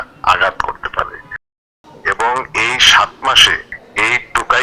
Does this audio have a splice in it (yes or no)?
yes